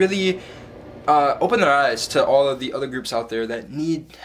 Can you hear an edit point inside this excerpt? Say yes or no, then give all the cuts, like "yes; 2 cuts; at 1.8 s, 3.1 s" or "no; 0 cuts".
no; 0 cuts